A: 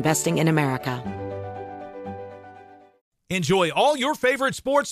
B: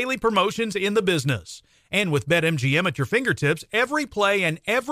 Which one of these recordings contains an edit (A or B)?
A